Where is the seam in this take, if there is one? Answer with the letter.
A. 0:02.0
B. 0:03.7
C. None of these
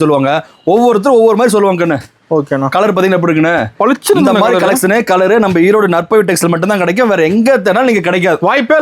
C